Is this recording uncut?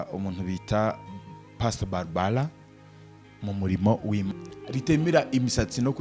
no; 1 cut; at 4.3 s

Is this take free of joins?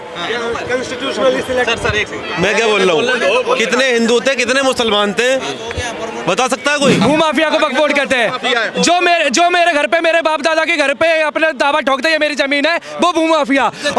no; 1 cut; at 7.0 s

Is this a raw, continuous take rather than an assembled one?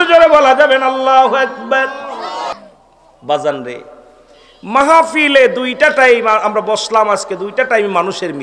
no; 1 cut; at 2.5 s

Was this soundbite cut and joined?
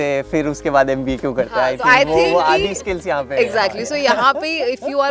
no; 0 cuts

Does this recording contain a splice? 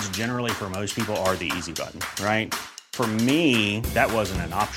no; 0 cuts

